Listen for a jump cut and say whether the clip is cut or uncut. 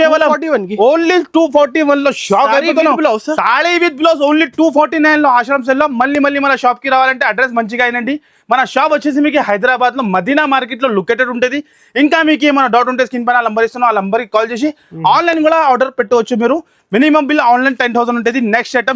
uncut